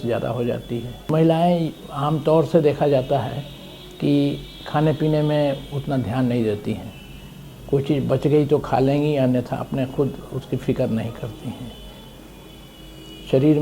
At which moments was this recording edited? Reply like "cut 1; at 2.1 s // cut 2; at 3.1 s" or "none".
cut 1; at 1.1 s

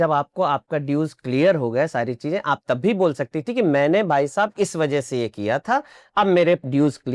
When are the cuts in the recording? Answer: none

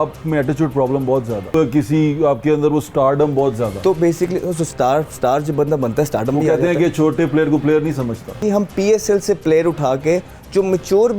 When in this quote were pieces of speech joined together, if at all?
cut 1; at 1.5 s // cut 2; at 8.4 s

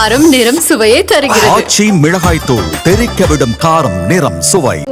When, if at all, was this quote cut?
none

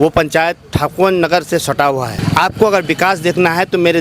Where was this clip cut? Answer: cut 1; at 2.2 s

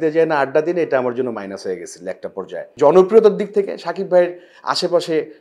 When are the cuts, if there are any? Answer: cut 1; at 2.6 s

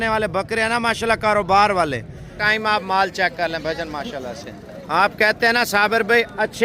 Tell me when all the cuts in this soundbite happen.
cut 1; at 2.4 s

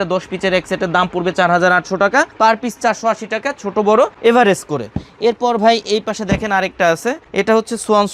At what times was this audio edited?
none

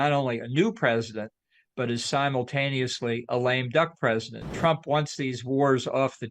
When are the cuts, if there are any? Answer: cut 1; at 4.5 s

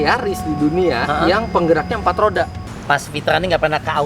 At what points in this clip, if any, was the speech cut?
cut 1; at 2.7 s

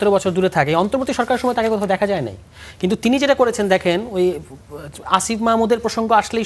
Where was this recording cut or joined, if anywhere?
none

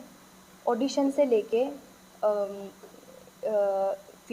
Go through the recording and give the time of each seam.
none

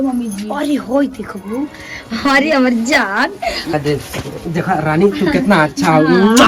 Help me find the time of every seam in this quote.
cut 1; at 3.7 s

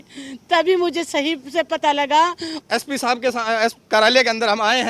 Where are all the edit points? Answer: cut 1; at 2.5 s

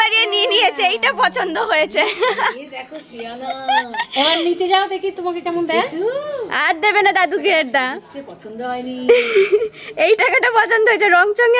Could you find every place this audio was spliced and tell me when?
none

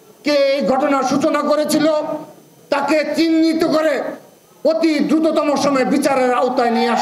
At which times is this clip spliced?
none

